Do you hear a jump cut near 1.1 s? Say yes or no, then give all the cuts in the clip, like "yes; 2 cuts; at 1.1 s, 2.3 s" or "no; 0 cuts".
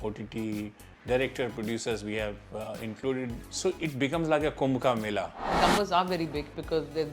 no; 2 cuts; at 3.4 s, 5.4 s